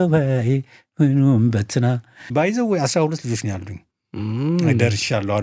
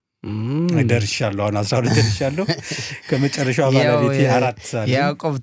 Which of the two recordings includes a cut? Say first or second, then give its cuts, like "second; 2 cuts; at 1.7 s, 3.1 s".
first; 1 cut; at 2.2 s